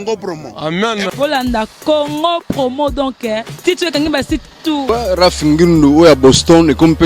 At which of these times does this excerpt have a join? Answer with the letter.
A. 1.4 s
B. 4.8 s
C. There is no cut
B